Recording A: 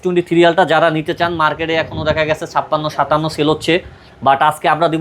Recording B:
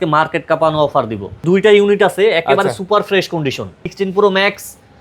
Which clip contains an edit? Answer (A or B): B